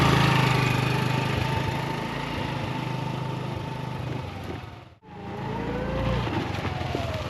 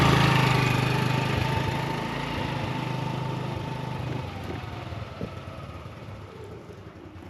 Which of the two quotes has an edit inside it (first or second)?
first